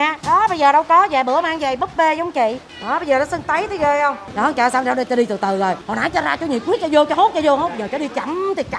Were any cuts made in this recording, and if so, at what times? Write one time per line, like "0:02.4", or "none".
0:02.7
0:04.2
0:05.8